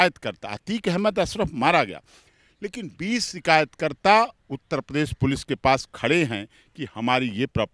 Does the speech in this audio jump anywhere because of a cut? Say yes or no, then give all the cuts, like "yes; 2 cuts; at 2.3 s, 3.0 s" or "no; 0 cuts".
no; 0 cuts